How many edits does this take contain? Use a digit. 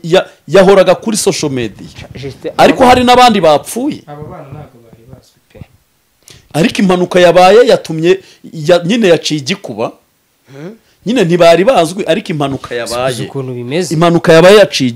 0